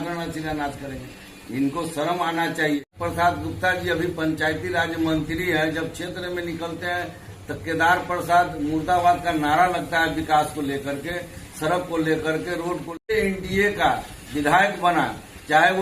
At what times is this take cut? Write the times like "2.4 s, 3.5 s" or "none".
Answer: 2.9 s, 13.1 s